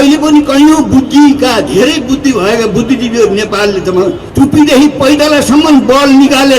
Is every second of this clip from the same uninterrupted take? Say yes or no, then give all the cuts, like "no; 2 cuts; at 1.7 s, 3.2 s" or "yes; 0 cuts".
no; 1 cut; at 4.2 s